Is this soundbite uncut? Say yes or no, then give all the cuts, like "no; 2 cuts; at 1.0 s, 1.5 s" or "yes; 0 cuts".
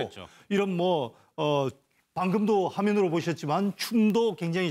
no; 1 cut; at 1.2 s